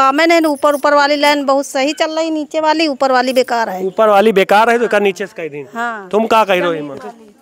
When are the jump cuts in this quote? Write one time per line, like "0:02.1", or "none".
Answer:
none